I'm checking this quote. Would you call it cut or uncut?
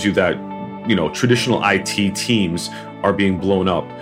uncut